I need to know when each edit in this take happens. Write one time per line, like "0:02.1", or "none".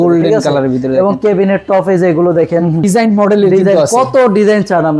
0:02.9